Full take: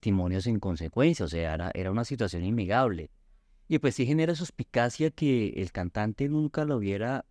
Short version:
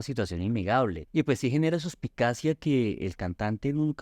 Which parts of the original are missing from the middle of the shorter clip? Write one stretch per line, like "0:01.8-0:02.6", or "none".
0:03.0-0:03.6